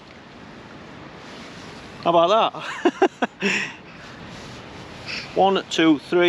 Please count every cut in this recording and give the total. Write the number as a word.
one